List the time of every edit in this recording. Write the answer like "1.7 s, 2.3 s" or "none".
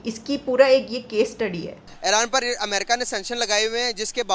1.9 s